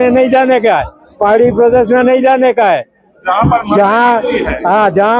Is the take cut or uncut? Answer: uncut